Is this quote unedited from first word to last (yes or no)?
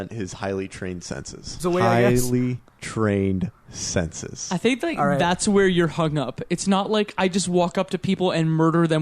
no